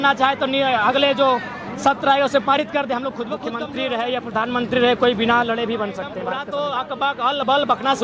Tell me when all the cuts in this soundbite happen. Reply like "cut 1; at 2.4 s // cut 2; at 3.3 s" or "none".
cut 1; at 3.5 s // cut 2; at 6.1 s